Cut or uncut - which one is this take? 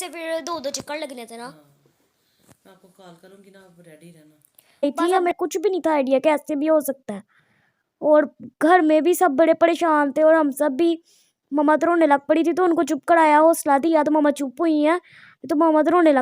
cut